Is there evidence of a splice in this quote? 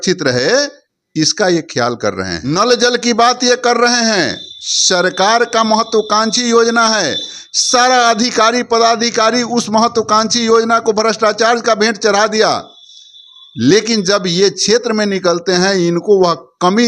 yes; 1 cut; at 2.4 s

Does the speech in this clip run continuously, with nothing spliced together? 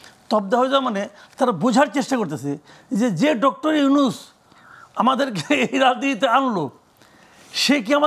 yes; 0 cuts

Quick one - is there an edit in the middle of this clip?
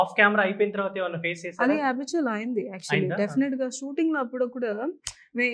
no; 0 cuts

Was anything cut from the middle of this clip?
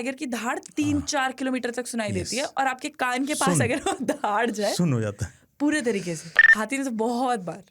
yes; 1 cut; at 6.4 s

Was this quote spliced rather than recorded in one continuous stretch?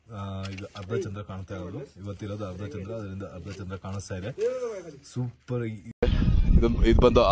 yes; 1 cut; at 6.0 s

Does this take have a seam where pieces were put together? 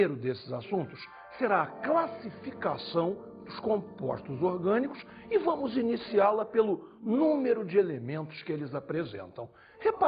yes; 1 cut; at 6.1 s

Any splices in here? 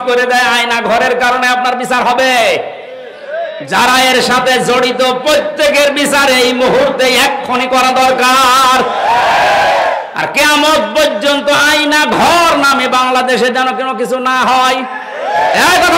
no; 0 cuts

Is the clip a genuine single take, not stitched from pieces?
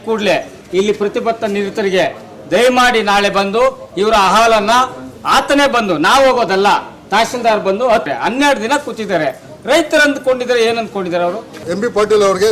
no; 2 cuts; at 8.1 s, 11.6 s

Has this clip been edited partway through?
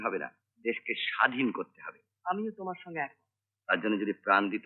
no; 0 cuts

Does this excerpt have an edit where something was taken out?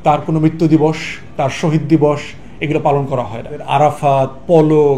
yes; 1 cut; at 3.6 s

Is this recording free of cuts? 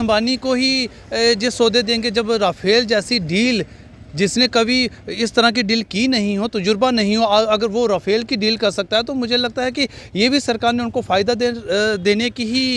yes; 0 cuts

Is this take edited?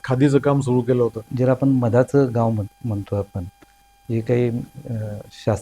yes; 1 cut; at 1.3 s

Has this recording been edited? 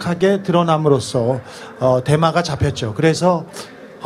yes; 1 cut; at 1.4 s

